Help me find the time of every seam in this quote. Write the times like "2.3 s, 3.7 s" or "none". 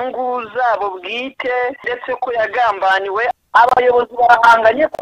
1.9 s, 3.3 s